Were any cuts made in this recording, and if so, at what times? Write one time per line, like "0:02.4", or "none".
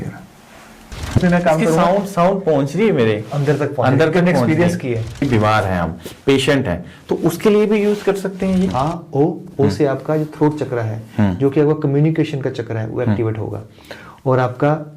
0:01.1
0:05.2
0:08.7

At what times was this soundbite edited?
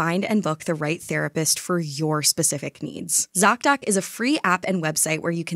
0:03.2

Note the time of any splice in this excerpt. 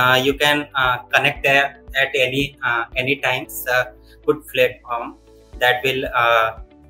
0:03.5

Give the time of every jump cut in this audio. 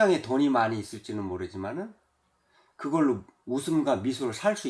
0:03.3

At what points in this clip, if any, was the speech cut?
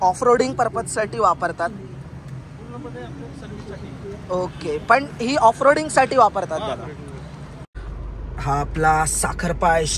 0:07.6

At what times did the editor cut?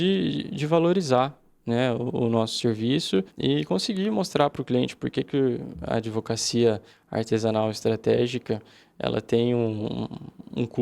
0:03.3

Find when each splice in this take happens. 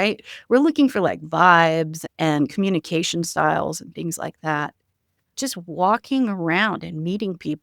0:02.0
0:05.3

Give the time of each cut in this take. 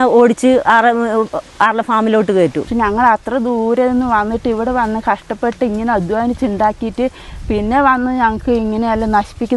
0:02.7

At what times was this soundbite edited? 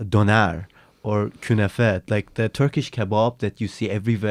none

